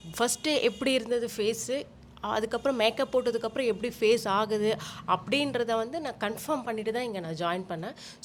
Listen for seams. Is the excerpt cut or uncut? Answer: uncut